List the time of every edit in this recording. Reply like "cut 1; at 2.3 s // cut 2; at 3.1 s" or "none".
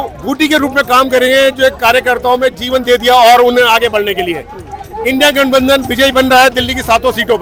none